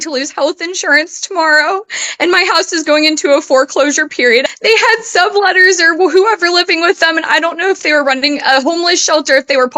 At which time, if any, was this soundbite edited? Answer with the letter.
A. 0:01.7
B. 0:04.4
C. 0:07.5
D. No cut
B